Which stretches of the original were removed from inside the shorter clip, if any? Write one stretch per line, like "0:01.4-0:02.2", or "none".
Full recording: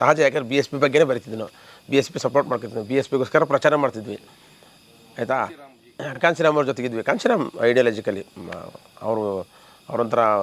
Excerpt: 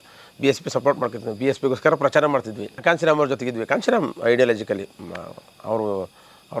0:04.1-0:06.0